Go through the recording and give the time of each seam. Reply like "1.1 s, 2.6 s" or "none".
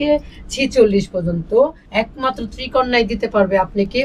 1.8 s